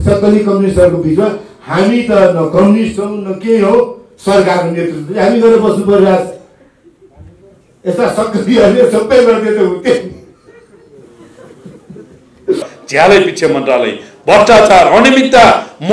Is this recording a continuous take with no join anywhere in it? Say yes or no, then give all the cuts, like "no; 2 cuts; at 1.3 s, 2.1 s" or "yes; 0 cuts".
no; 1 cut; at 12.8 s